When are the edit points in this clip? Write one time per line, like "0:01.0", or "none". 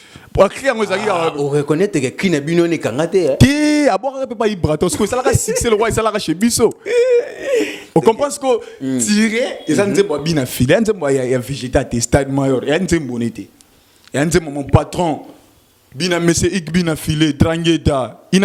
none